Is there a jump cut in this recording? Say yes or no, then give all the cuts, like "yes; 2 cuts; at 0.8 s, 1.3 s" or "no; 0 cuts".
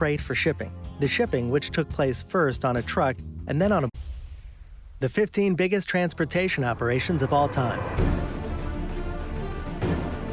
no; 0 cuts